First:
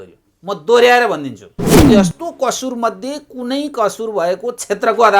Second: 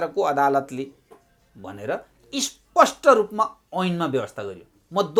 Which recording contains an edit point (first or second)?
first